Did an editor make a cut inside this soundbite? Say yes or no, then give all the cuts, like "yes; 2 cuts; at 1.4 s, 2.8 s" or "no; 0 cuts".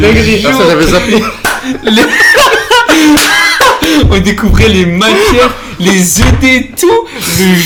no; 0 cuts